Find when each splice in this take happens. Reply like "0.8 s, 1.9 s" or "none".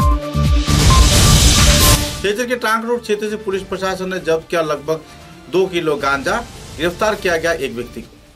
2.0 s